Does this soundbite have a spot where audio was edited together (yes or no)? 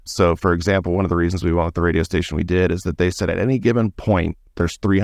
no